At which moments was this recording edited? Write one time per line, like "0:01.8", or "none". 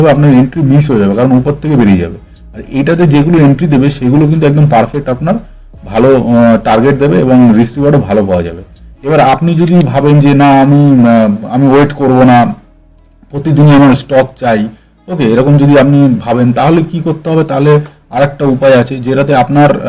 none